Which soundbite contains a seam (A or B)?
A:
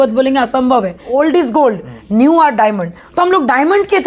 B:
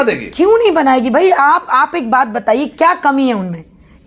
A